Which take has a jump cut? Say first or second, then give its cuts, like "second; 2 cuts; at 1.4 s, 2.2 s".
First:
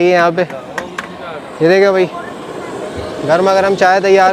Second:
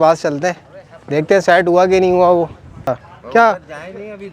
second; 1 cut; at 2.9 s